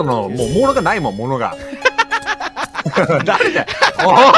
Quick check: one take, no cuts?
yes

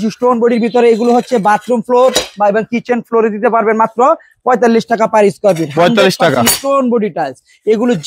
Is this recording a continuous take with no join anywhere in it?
yes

